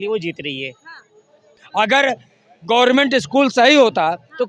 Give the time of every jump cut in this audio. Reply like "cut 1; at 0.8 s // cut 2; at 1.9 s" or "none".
cut 1; at 1.6 s